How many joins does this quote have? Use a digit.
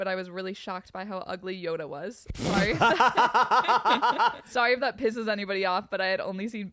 1